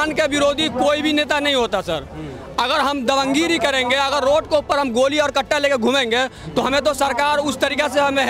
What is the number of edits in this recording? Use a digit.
0